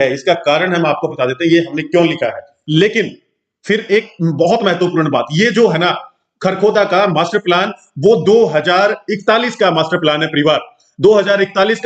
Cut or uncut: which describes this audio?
cut